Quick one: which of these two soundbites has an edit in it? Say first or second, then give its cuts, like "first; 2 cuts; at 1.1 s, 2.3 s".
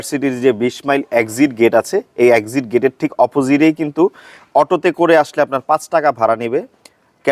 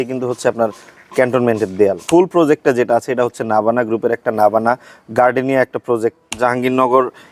second; 2 cuts; at 2.0 s, 6.3 s